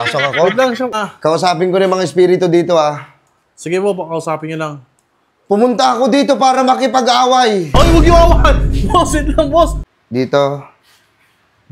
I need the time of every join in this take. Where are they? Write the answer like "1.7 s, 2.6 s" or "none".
1.0 s, 9.8 s

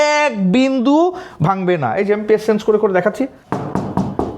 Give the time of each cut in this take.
3.4 s

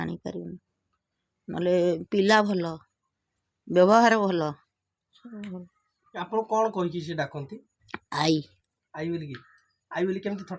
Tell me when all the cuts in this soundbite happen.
none

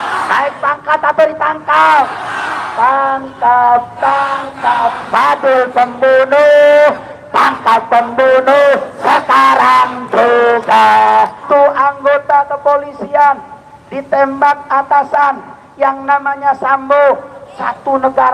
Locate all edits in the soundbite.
11.4 s

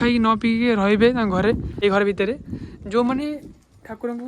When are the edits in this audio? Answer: 1.7 s

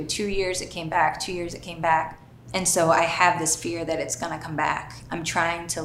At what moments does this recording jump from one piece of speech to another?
2.4 s, 4.9 s

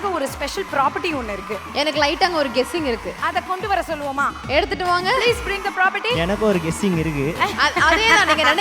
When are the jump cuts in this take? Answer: none

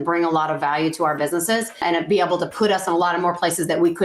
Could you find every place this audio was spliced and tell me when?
1.8 s

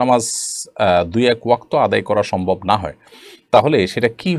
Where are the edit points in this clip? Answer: none

